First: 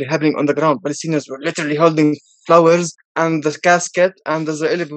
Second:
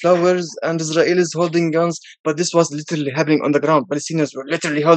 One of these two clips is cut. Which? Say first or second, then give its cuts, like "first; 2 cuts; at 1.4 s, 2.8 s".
first; 1 cut; at 3.0 s